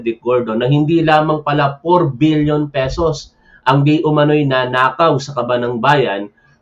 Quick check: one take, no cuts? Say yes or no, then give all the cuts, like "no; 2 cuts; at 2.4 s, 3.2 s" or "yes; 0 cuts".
yes; 0 cuts